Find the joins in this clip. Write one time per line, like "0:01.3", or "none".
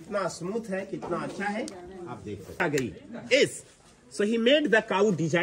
0:02.6